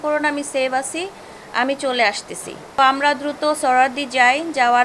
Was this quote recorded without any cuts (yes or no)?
no